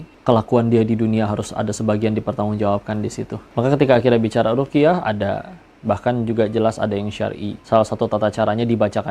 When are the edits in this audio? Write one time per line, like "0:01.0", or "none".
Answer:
0:03.4